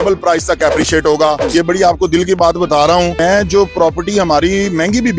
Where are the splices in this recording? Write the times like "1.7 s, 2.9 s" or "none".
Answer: 1.4 s, 3.2 s